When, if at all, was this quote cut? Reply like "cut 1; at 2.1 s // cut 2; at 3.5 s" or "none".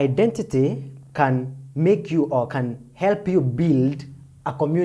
none